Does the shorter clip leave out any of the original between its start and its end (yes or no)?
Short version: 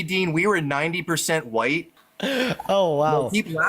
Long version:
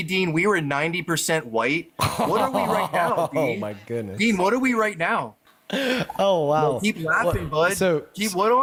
yes